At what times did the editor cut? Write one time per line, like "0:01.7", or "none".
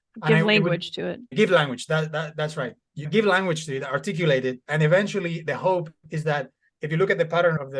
0:01.3
0:02.9